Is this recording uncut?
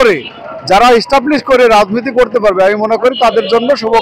yes; 0 cuts

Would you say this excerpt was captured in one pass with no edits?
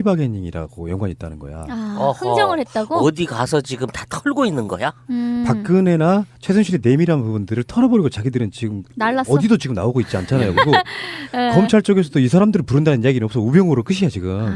no; 1 cut; at 10.5 s

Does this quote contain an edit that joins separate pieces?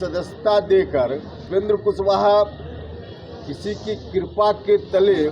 yes; 1 cut; at 1.4 s

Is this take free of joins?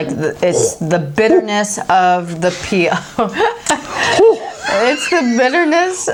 yes; 0 cuts

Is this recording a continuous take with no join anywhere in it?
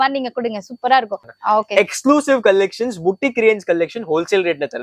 no; 1 cut; at 1.3 s

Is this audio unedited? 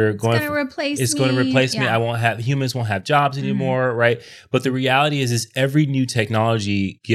yes; 0 cuts

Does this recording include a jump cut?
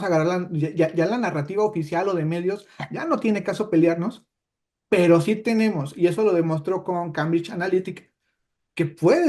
no; 0 cuts

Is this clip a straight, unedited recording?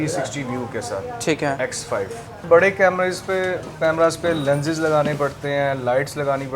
no; 1 cut; at 2.4 s

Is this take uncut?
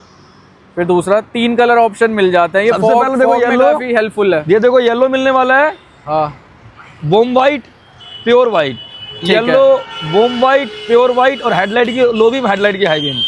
yes; 0 cuts

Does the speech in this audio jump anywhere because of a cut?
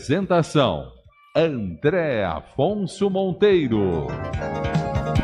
yes; 1 cut; at 4.2 s

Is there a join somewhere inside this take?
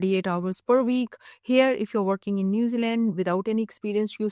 yes; 1 cut; at 1.3 s

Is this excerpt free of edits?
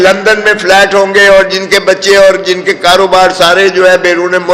yes; 0 cuts

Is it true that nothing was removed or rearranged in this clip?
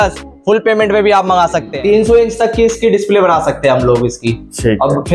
no; 1 cut; at 1.7 s

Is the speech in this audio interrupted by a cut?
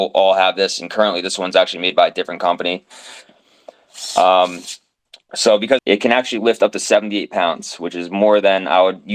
yes; 1 cut; at 5.8 s

